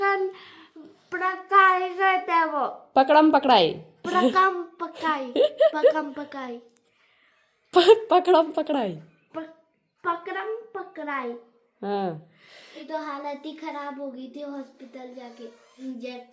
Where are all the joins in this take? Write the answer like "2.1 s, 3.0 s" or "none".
none